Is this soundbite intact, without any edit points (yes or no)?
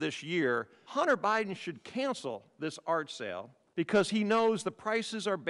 yes